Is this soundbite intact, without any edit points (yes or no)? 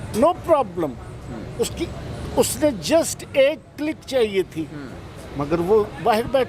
yes